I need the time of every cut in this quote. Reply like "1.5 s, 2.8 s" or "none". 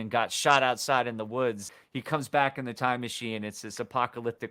1.7 s